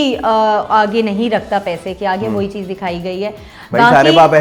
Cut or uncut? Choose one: uncut